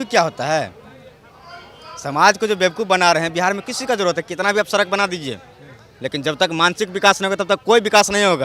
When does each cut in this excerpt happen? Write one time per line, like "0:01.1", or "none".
none